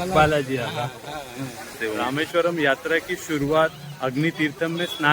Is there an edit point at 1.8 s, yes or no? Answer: yes